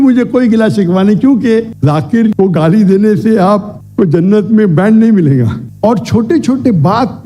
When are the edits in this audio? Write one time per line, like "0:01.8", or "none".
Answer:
0:01.7
0:05.6